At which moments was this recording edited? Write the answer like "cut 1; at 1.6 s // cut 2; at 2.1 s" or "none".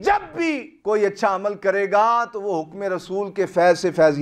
none